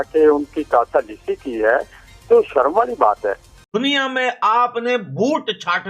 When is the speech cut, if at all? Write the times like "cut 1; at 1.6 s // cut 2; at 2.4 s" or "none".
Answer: cut 1; at 3.6 s